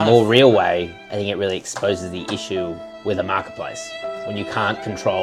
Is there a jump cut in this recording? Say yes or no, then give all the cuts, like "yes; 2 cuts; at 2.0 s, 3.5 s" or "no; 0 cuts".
no; 0 cuts